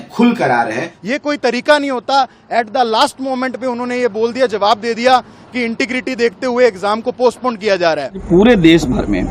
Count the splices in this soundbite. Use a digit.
2